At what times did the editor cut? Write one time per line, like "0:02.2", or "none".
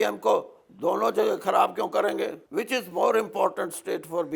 0:02.4

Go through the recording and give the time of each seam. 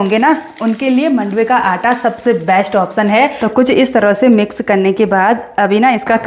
0:03.4

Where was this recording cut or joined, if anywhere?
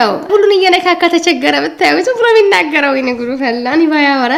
none

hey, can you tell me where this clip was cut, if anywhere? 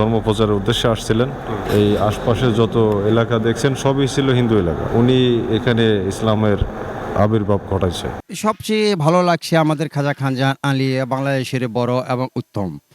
0:01.6
0:04.8
0:08.1

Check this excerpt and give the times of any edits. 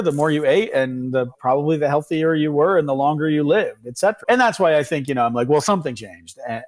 0:04.2

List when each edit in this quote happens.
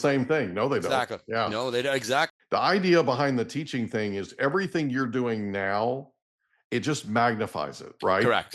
0:02.4

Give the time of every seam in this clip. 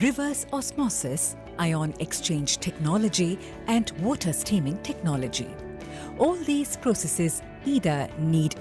0:06.1

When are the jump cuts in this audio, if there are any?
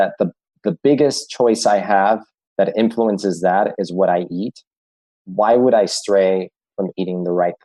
none

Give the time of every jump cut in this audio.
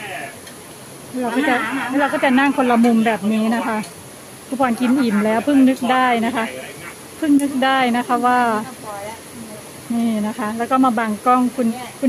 none

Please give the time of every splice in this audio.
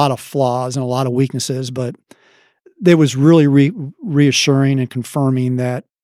none

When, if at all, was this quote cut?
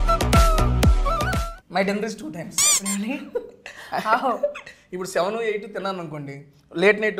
0:01.5

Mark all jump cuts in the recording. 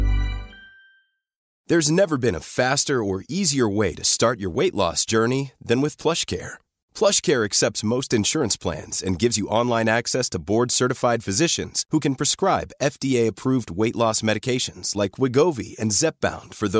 0:01.5

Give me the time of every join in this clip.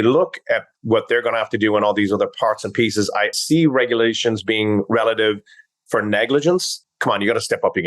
0:03.4
0:06.9

